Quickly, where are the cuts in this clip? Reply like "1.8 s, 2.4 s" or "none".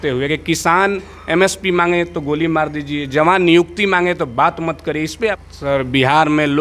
5.4 s